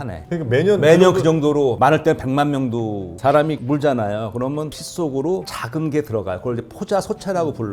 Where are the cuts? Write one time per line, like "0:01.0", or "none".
0:03.2

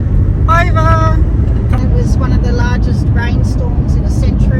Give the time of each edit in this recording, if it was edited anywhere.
0:01.8

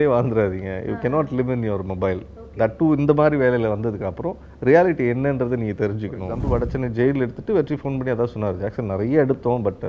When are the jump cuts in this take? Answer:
0:06.4

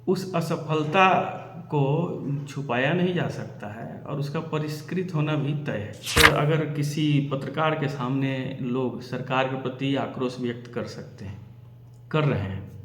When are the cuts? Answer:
0:06.2

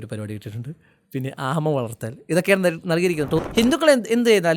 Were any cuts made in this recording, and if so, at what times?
0:03.4

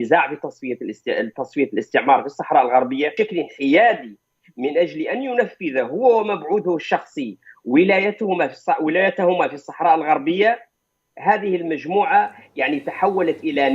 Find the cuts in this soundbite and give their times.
0:03.1

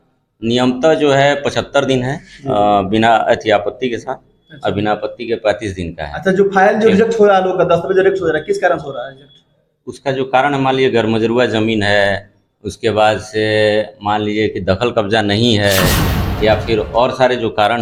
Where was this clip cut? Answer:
none

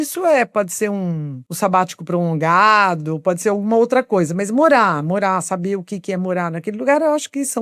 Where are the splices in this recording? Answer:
none

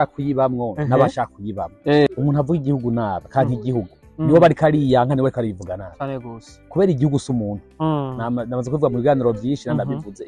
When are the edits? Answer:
0:02.1

